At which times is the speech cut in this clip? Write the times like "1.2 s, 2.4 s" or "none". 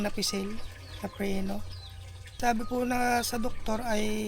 2.4 s

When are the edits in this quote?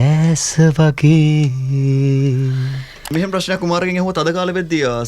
3.1 s

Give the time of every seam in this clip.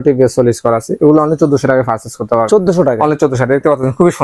none

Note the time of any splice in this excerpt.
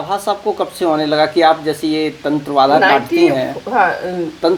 none

